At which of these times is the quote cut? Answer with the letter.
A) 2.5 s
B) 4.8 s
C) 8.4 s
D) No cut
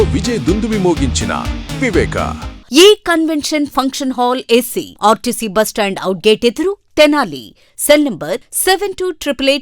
A